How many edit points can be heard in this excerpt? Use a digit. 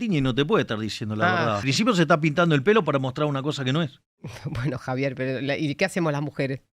1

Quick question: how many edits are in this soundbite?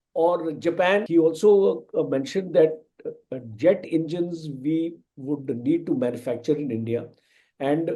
1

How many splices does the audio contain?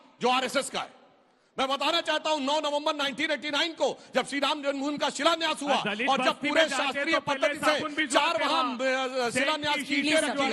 0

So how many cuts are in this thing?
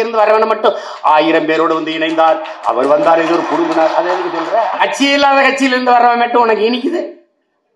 1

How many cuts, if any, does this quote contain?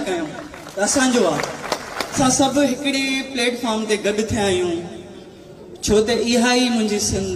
1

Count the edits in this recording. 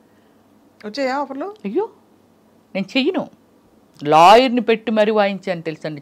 0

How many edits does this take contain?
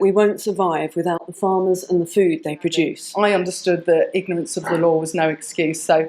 1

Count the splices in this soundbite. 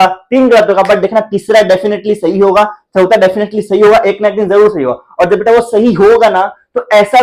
0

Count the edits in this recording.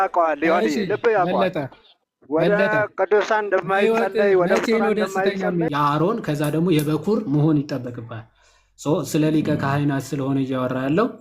1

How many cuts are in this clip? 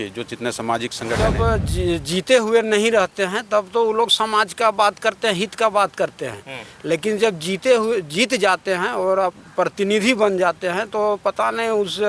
1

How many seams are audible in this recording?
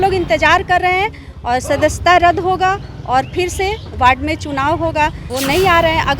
1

